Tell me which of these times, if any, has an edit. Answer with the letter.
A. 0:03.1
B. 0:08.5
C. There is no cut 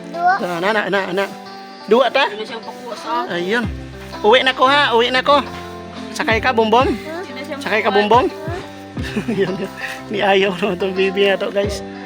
C